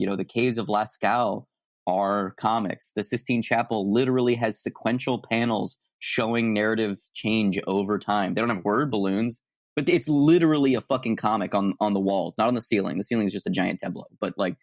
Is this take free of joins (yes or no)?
yes